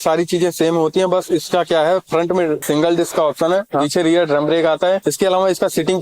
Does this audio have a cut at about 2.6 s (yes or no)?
yes